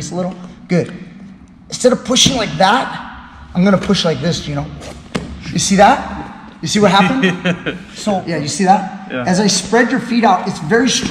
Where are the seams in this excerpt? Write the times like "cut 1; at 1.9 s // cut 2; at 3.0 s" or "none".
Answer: cut 1; at 8.0 s

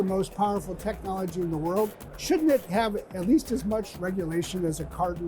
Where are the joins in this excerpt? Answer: cut 1; at 2.1 s

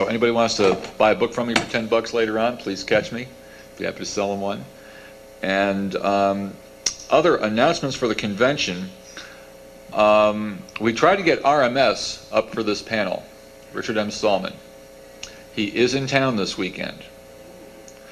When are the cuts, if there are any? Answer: cut 1; at 11.1 s

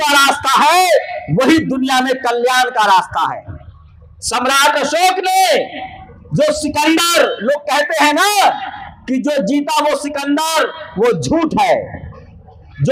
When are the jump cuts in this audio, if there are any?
none

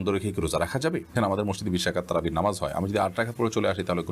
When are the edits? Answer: cut 1; at 1.2 s

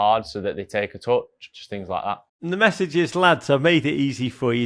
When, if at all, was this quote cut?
cut 1; at 1.5 s

